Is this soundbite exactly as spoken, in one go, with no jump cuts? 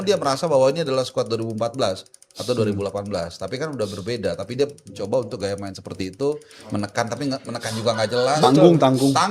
yes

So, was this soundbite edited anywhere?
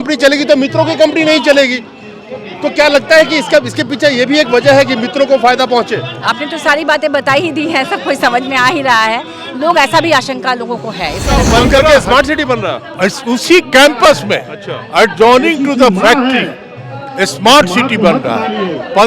yes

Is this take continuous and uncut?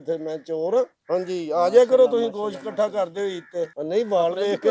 no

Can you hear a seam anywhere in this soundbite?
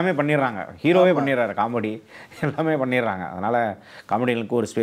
no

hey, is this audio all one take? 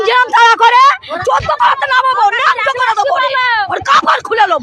no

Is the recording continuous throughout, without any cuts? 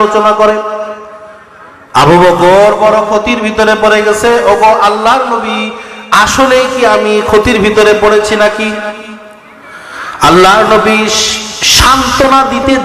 yes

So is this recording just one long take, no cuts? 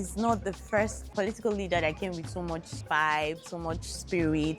no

